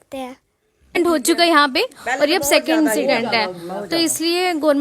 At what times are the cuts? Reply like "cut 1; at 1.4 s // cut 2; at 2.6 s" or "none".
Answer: cut 1; at 1.0 s